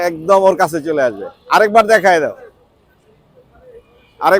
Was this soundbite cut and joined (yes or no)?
no